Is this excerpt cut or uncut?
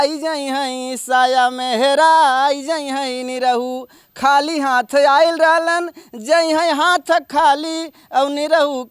uncut